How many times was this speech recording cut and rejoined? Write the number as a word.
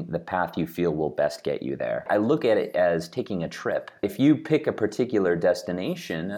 two